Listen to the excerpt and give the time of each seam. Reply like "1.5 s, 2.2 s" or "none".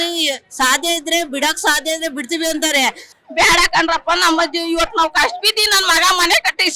3.1 s